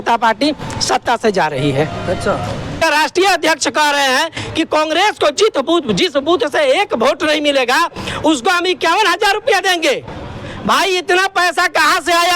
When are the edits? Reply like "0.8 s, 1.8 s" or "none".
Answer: 2.8 s